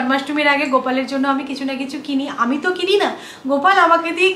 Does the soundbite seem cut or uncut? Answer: uncut